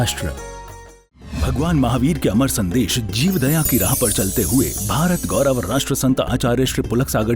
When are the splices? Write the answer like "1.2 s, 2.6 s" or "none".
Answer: 1.2 s